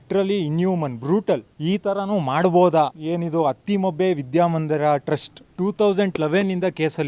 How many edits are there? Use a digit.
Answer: 3